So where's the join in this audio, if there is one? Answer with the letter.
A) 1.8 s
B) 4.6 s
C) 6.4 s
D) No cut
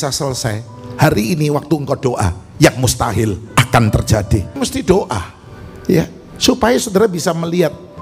B